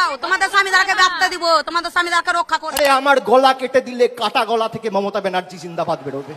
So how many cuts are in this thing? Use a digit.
1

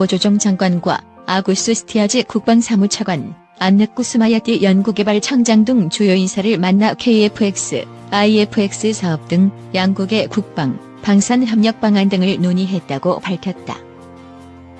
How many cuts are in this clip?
1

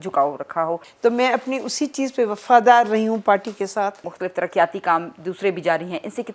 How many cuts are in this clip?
2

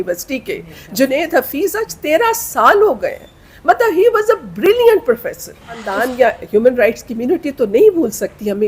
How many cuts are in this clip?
1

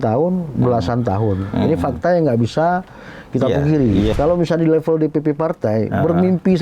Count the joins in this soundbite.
1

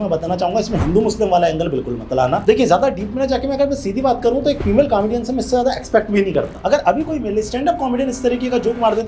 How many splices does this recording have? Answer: 2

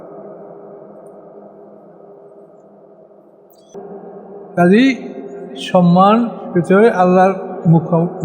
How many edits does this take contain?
1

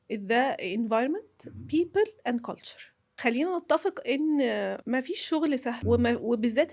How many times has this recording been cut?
3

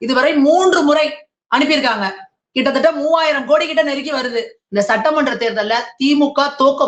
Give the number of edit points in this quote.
1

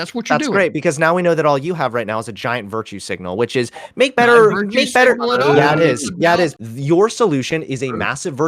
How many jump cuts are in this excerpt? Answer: 1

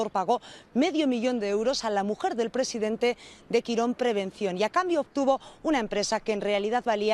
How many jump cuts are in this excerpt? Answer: 0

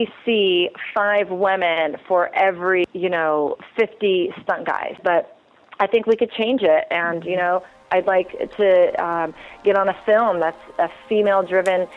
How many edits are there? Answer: 2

